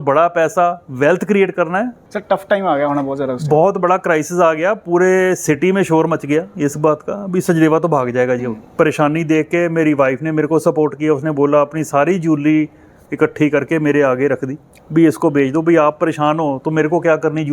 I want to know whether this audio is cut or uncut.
cut